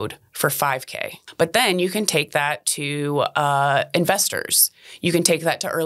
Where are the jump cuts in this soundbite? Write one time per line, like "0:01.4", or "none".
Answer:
0:01.2